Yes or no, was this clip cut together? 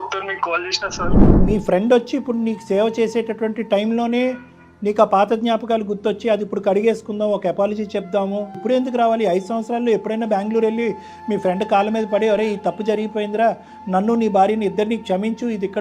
yes